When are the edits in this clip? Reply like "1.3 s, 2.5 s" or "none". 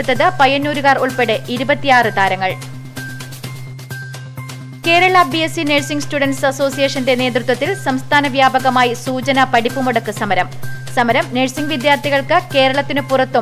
none